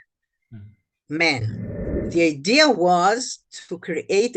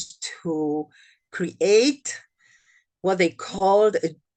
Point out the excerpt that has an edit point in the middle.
first; 1 cut; at 2.0 s

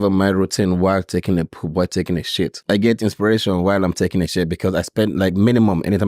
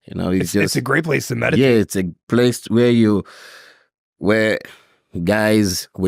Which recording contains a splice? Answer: first; 1 cut; at 2.6 s

